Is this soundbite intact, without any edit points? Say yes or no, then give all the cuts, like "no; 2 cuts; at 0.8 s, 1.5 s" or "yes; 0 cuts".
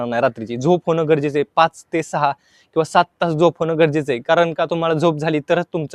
yes; 0 cuts